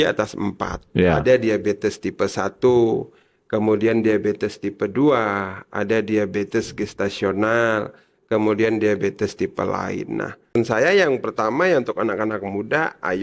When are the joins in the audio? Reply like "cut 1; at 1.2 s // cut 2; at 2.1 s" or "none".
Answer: cut 1; at 10.6 s